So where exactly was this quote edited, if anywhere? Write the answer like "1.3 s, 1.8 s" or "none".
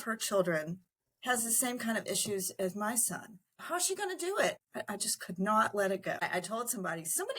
3.6 s, 4.6 s, 6.2 s